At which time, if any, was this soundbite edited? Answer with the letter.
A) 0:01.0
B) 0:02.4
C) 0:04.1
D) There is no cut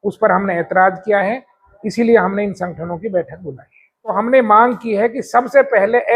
C